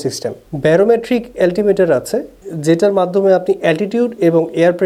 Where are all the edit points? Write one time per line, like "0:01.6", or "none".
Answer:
none